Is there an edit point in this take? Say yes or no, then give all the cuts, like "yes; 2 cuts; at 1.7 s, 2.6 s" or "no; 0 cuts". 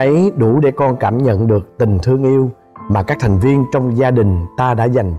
no; 0 cuts